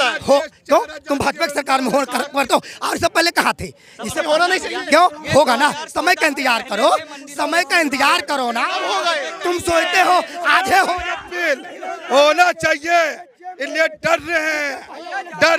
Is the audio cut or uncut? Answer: uncut